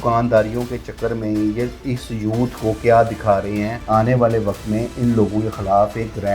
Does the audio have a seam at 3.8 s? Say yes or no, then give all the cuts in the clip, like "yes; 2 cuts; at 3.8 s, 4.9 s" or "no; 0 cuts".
yes; 1 cut; at 3.8 s